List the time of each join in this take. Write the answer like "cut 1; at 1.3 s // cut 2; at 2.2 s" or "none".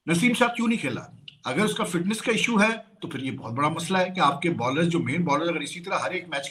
none